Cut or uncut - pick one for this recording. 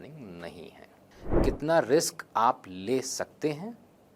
cut